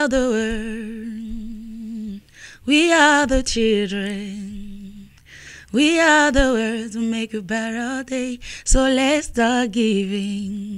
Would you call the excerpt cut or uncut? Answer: uncut